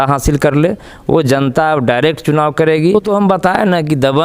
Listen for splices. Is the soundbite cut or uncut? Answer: cut